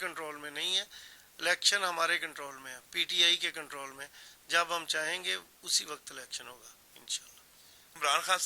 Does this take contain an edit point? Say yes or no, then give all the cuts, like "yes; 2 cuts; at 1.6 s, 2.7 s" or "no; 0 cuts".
no; 0 cuts